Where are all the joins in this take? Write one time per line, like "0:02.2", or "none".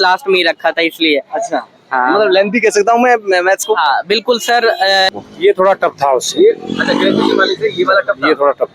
0:05.1